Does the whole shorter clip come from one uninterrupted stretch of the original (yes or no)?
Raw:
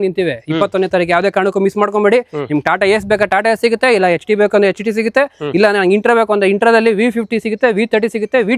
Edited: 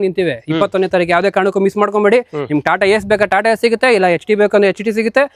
yes